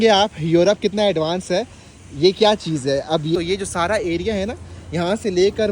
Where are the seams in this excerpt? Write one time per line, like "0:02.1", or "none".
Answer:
0:03.3